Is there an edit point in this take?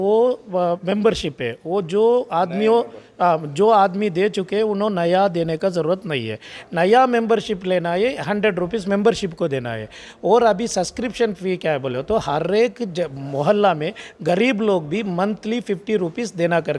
no; 0 cuts

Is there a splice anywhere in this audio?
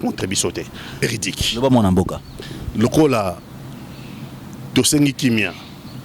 yes; 1 cut; at 1.0 s

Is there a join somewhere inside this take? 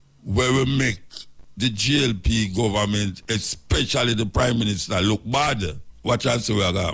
yes; 1 cut; at 5.8 s

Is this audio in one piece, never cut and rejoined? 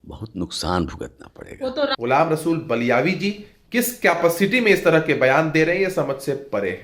no; 1 cut; at 1.9 s

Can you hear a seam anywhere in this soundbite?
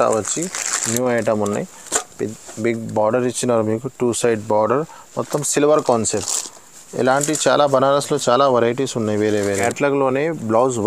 yes; 1 cut; at 9.6 s

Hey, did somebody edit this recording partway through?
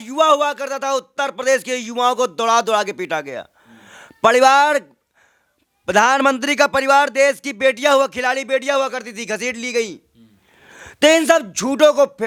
no; 0 cuts

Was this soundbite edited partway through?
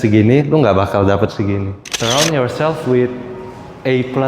yes; 1 cut; at 1.9 s

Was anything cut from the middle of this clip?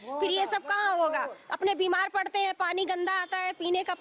no; 0 cuts

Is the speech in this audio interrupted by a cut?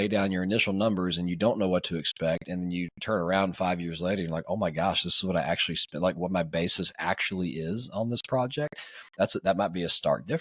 no; 0 cuts

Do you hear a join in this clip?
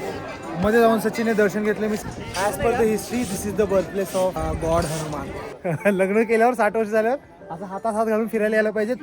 yes; 3 cuts; at 2.1 s, 4.4 s, 5.5 s

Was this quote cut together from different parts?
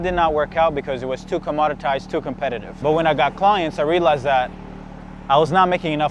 yes; 1 cut; at 2.7 s

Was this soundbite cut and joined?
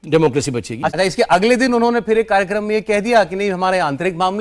yes; 1 cut; at 0.9 s

